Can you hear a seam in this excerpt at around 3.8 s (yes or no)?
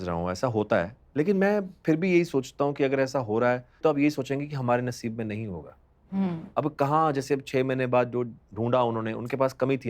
yes